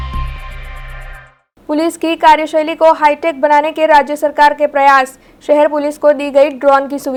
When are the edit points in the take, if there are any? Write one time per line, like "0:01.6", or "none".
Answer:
none